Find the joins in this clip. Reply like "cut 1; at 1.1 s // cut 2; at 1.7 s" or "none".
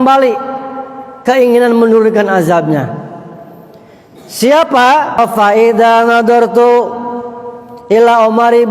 cut 1; at 5.2 s